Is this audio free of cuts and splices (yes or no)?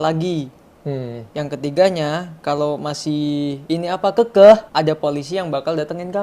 no